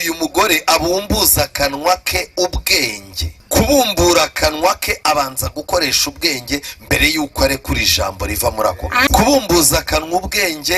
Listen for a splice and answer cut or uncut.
cut